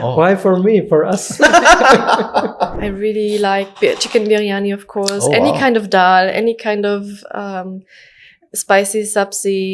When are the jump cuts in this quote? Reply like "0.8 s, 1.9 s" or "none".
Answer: 2.8 s